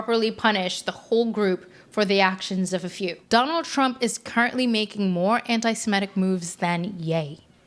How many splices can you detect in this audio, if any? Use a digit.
1